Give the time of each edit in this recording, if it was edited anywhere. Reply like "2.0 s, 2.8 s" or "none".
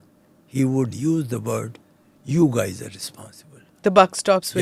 none